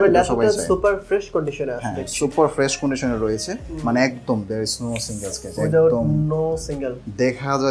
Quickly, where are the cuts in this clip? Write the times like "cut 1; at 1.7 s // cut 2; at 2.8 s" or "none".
none